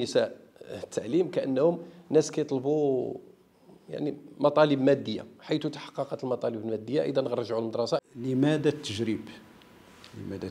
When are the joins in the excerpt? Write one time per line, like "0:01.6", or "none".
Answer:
0:08.0